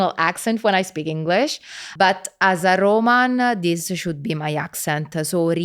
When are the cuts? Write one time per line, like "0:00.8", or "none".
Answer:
0:01.9